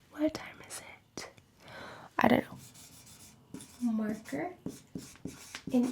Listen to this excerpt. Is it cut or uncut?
cut